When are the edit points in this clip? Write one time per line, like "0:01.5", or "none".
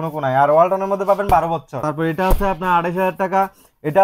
0:01.8